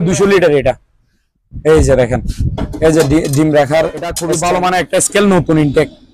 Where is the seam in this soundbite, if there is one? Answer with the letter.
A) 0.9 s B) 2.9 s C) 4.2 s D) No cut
C